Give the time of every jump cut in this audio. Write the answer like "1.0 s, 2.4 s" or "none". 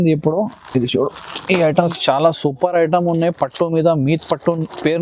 1.8 s